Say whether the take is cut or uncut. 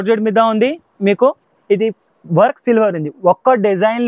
uncut